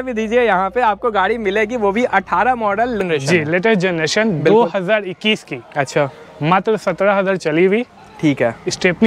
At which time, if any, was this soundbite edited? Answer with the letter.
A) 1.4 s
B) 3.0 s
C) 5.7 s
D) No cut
B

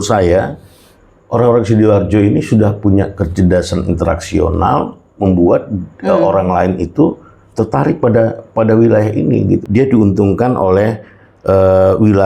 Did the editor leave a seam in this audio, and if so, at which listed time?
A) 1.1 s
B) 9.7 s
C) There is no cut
B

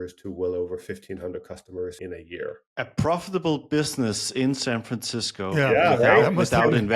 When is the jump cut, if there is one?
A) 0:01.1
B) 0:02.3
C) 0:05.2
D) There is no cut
B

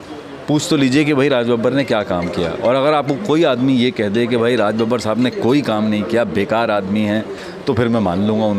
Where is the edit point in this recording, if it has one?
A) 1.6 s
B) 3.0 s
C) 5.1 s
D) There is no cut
D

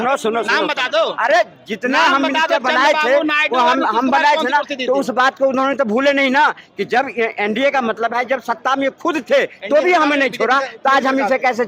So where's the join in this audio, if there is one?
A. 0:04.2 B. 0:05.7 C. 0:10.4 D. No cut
D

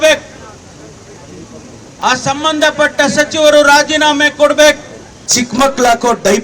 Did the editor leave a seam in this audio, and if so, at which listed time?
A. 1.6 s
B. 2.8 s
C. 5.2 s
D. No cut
C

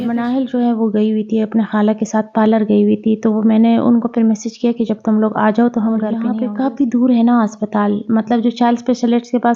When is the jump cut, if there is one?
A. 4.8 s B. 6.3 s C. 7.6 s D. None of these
B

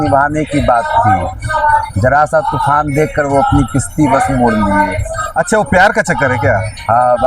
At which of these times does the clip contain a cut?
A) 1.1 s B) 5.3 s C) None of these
C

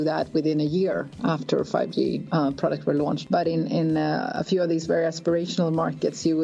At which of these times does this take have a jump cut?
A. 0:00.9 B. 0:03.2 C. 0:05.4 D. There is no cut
B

